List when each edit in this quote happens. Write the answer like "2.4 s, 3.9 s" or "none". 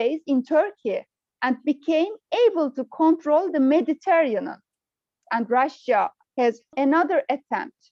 5.2 s